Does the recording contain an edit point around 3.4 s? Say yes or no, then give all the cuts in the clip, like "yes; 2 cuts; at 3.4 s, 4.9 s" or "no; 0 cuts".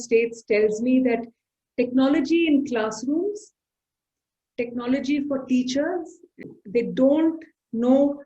no; 1 cut; at 6.5 s